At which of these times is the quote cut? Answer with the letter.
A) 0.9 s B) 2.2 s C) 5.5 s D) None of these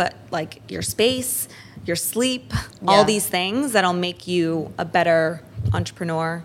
C